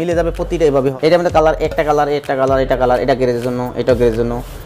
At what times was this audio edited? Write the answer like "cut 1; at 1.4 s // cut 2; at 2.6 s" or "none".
cut 1; at 0.9 s